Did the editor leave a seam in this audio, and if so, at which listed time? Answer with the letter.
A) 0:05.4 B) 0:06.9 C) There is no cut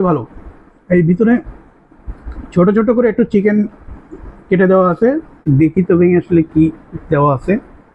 A